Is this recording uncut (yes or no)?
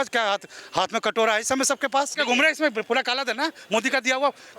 no